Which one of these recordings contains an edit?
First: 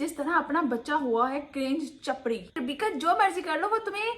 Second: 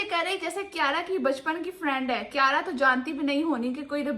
first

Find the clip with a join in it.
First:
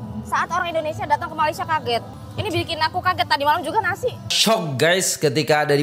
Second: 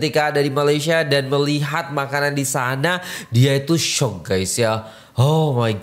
first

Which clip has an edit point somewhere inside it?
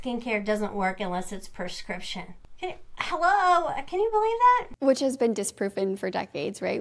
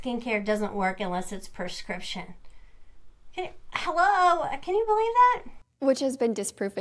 first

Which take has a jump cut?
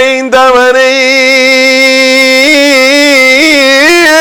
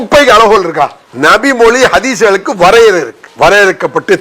second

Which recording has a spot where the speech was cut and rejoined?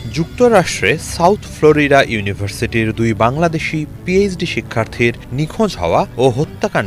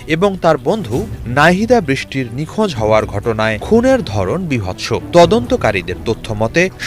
second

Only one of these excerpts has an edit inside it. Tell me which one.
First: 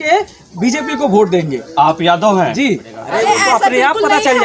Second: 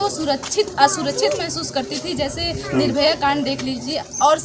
first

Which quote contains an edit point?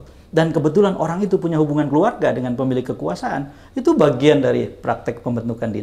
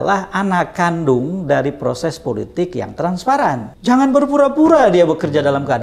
second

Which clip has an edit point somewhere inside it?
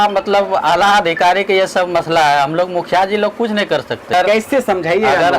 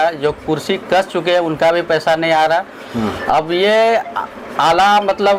first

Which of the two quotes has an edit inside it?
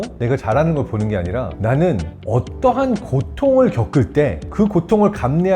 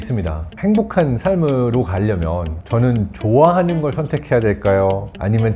first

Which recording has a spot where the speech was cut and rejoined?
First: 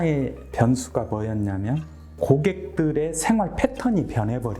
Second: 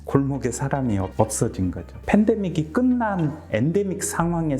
second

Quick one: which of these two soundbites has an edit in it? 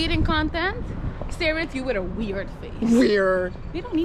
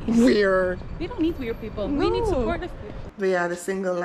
second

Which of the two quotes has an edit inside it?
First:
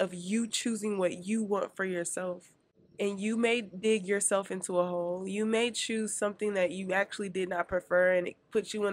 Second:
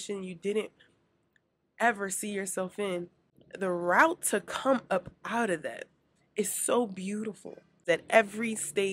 second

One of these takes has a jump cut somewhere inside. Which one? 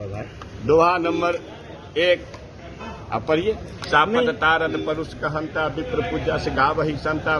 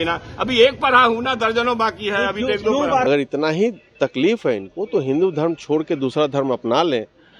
second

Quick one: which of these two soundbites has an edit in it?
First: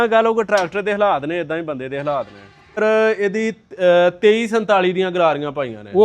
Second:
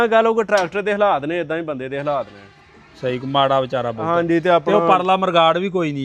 first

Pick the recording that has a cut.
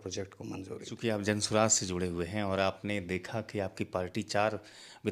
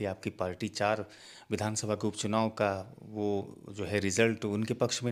first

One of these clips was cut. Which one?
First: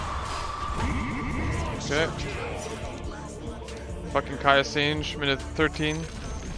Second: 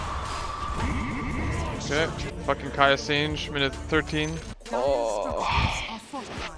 second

